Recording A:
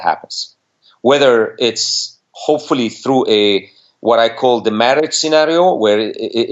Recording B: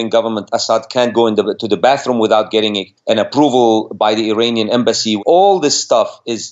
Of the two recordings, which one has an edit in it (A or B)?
B